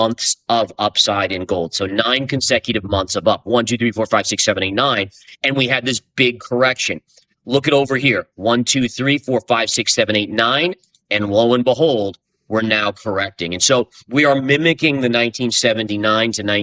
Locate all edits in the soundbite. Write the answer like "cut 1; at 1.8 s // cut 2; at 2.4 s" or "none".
none